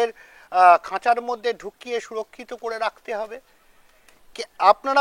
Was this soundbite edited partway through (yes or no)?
no